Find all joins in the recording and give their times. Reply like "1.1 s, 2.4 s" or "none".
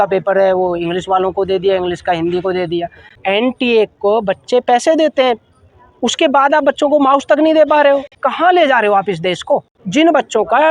3.2 s, 8.2 s, 9.8 s